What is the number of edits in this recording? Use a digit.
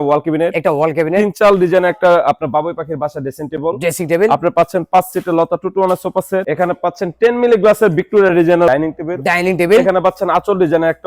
0